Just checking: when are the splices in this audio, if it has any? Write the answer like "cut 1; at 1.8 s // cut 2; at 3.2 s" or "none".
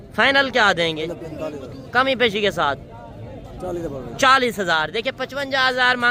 none